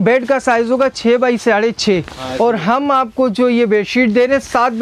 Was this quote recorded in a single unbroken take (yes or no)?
yes